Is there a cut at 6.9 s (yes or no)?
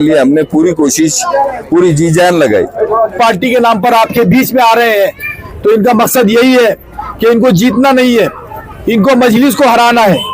no